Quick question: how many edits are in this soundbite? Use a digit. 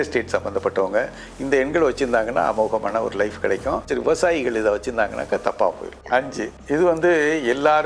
2